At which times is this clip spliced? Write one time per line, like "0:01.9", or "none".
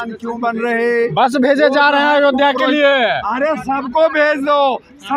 none